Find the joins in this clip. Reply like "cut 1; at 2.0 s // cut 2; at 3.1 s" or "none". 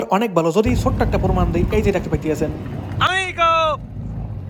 none